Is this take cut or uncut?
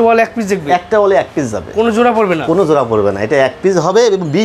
uncut